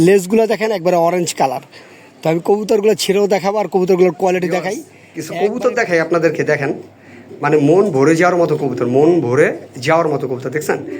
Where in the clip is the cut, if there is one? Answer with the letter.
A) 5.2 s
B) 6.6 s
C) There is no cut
A